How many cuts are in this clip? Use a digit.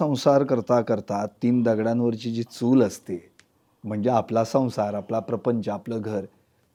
0